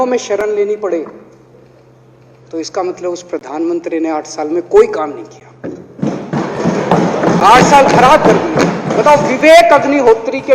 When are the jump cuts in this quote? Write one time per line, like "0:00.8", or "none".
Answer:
none